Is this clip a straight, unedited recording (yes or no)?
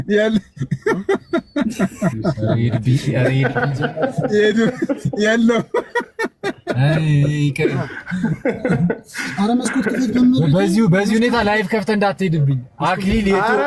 yes